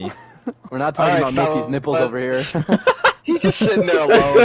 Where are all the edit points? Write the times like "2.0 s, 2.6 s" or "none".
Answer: 3.2 s